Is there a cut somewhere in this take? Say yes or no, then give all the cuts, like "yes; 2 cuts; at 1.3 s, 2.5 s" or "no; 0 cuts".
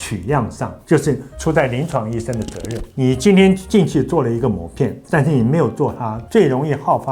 no; 0 cuts